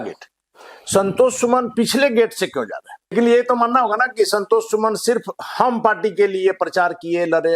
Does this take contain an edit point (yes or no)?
yes